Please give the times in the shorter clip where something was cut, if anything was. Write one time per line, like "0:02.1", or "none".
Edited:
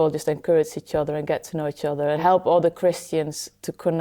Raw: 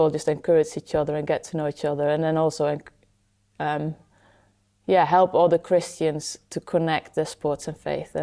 0:02.2